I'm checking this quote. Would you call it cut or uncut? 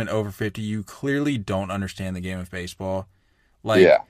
uncut